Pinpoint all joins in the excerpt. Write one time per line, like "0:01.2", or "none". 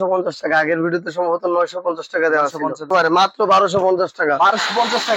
0:02.9

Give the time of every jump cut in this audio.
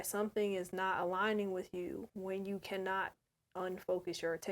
0:02.1

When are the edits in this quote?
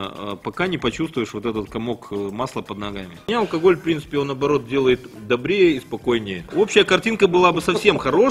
0:03.3
0:06.5

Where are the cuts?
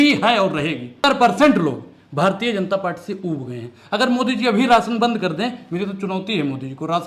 0:01.0

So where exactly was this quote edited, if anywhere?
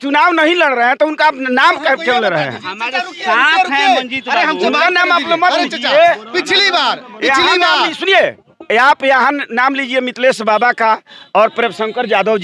none

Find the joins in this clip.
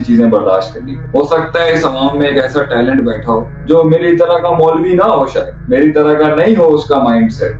0:01.0
0:03.5
0:05.5

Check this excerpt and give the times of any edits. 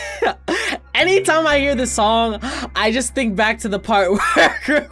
none

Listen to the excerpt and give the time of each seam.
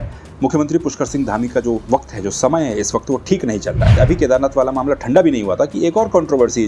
0:03.9

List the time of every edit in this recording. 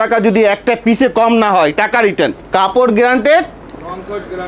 0:02.4

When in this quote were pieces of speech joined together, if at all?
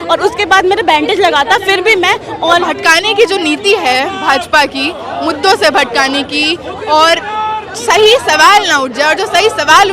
0:02.6

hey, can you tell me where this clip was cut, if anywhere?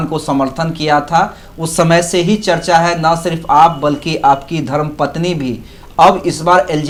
none

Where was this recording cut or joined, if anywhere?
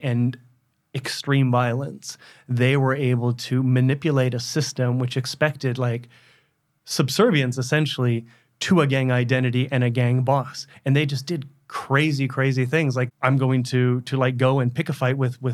0:13.1

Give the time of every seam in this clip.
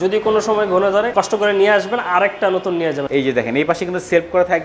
0:01.1
0:03.1

